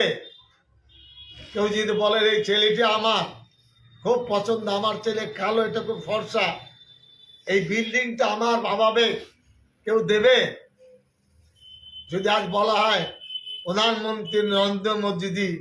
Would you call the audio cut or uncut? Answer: uncut